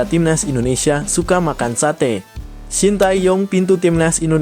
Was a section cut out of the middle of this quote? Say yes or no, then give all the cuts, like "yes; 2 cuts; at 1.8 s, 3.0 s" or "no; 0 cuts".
yes; 1 cut; at 2.5 s